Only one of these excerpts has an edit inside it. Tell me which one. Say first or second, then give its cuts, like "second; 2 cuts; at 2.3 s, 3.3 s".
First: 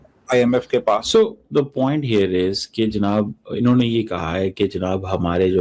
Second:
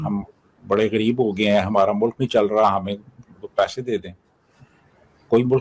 first; 1 cut; at 1.5 s